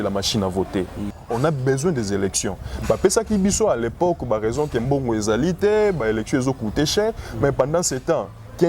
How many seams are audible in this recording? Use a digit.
1